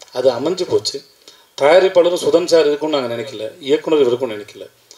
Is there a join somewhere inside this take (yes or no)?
no